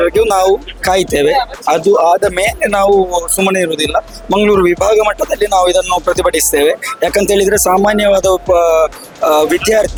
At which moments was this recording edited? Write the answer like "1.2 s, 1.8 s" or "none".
none